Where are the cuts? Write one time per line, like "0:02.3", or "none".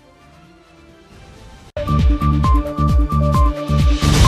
0:01.7

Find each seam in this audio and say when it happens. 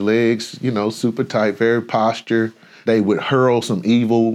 0:02.6

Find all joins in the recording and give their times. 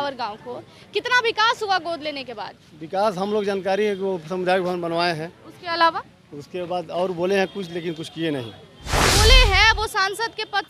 0:09.0

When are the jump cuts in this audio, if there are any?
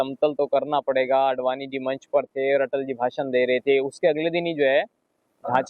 none

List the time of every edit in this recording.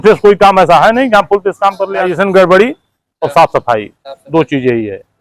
0:02.1

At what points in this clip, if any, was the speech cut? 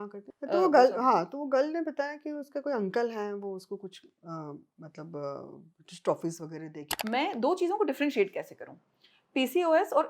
0:07.0

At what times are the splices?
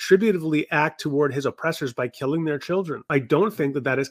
0:03.0

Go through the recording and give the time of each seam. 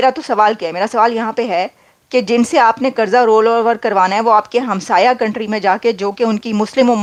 none

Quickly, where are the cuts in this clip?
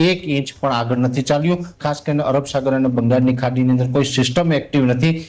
0:01.7

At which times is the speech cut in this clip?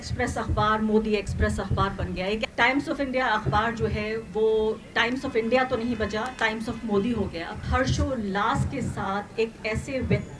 0:02.4
0:07.6

